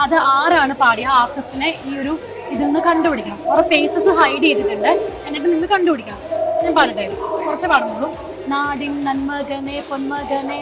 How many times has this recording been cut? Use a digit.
0